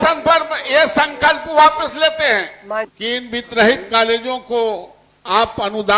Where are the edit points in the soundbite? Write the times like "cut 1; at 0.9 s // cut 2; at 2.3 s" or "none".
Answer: cut 1; at 2.9 s